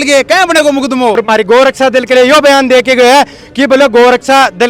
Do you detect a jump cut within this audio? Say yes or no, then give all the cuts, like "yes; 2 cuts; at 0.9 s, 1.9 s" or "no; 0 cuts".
yes; 1 cut; at 1.2 s